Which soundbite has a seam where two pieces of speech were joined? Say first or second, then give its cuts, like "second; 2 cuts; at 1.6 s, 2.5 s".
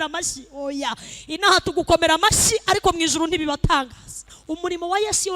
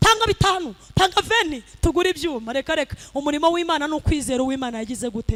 first; 1 cut; at 4.3 s